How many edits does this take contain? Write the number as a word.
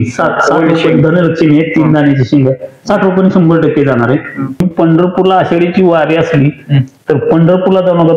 one